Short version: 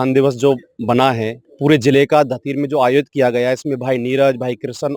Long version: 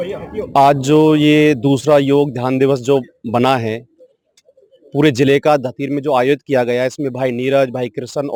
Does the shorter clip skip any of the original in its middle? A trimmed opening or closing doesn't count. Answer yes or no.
yes